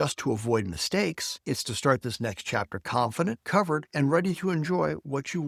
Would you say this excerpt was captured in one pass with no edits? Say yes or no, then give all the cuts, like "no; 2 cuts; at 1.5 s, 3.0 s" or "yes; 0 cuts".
yes; 0 cuts